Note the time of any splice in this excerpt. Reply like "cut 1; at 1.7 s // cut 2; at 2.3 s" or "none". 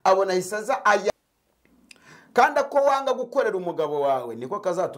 cut 1; at 1.1 s

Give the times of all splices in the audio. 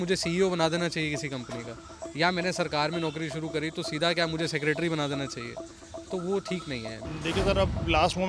cut 1; at 6.9 s

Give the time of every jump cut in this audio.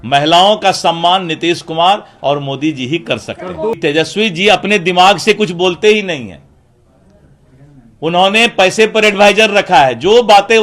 cut 1; at 3.8 s

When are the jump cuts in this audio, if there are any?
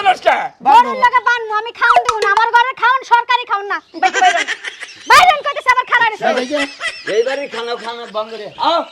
none

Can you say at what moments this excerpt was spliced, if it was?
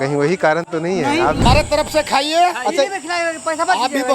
cut 1; at 1.4 s

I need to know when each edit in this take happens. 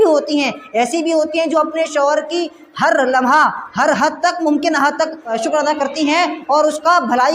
cut 1; at 5.4 s

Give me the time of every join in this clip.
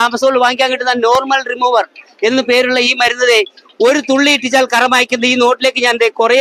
none

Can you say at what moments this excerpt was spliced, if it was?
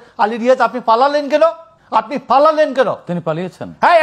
cut 1; at 1.7 s

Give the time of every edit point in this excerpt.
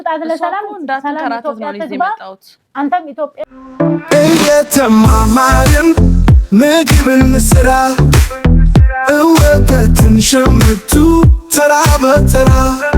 cut 1; at 3.4 s

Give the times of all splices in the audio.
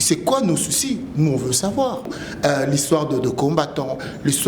cut 1; at 2.2 s

